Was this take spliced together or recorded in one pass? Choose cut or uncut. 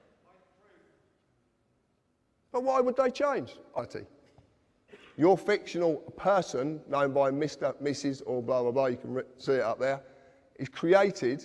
uncut